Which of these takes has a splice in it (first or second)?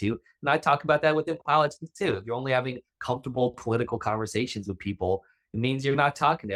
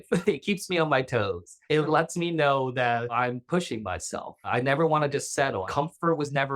second